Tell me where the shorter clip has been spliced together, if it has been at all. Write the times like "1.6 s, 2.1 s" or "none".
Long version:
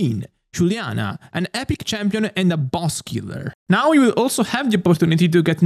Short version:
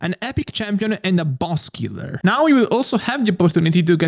2.0 s